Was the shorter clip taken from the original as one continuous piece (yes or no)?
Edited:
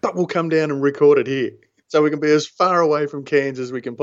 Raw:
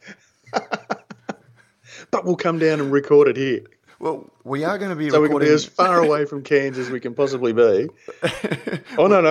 no